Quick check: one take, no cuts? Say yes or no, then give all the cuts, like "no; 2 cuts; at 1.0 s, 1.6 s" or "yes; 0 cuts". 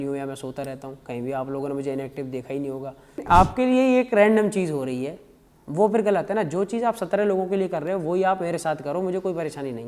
no; 1 cut; at 3.2 s